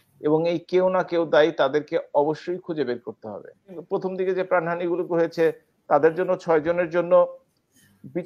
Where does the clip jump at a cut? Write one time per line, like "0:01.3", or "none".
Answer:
0:03.8